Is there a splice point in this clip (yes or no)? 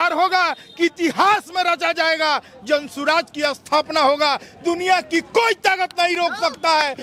no